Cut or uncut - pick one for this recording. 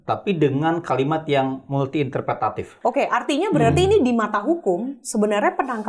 cut